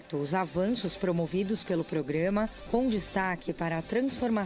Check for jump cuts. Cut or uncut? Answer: uncut